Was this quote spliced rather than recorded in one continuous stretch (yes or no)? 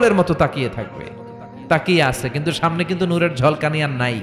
no